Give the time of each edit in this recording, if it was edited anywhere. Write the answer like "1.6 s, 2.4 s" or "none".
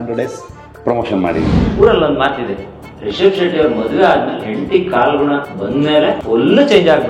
1.6 s, 5.8 s